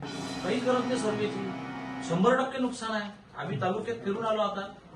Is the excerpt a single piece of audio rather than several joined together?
yes; 0 cuts

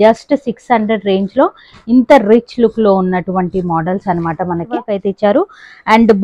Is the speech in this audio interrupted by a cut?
yes; 1 cut; at 4.9 s

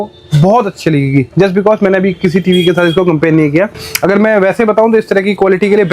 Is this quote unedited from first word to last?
yes; 0 cuts

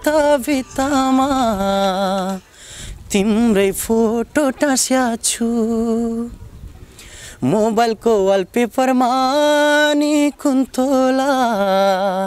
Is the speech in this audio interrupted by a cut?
no; 0 cuts

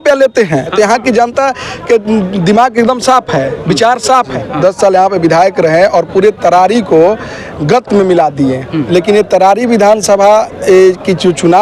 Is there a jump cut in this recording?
yes; 3 cuts; at 0.7 s, 4.3 s, 8.8 s

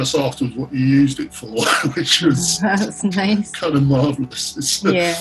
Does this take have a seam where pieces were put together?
no; 0 cuts

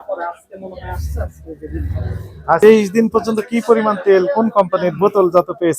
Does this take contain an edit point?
yes; 1 cut; at 2.6 s

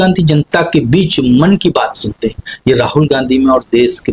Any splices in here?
no; 0 cuts

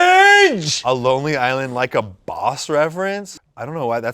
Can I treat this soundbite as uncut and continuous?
no; 1 cut; at 3.3 s

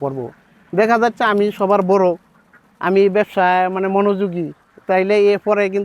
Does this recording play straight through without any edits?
yes; 0 cuts

